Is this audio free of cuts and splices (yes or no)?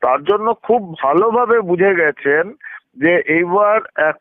yes